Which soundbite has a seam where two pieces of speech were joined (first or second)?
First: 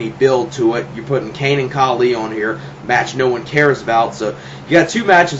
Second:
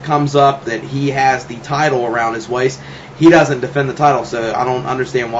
first